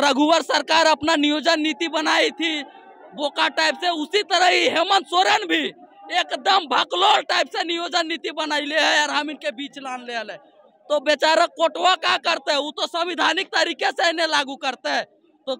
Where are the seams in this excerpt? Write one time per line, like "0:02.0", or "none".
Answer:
none